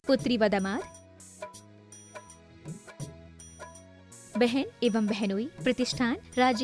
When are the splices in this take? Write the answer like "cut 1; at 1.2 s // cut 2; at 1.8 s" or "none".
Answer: cut 1; at 1.2 s